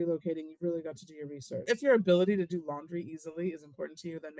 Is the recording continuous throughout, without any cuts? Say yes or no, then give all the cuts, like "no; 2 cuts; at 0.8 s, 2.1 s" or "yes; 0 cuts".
no; 1 cut; at 1.7 s